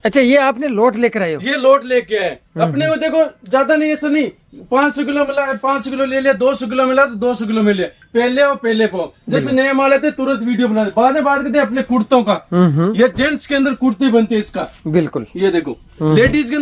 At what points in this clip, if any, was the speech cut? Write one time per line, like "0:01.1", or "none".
none